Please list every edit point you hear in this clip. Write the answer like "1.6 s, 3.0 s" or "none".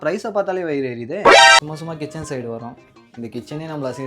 1.6 s

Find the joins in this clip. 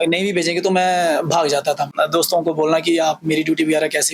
1.9 s

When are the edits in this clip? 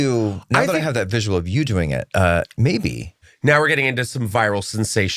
3.2 s

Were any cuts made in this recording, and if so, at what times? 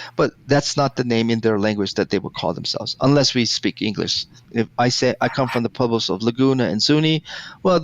4.4 s

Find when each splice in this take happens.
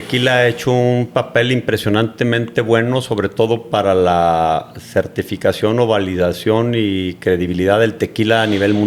none

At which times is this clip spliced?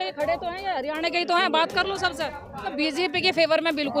2.7 s

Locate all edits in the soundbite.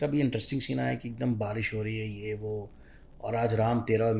none

